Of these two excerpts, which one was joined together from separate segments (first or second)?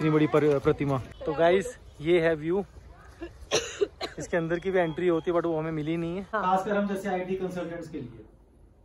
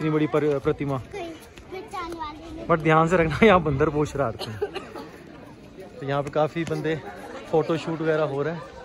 first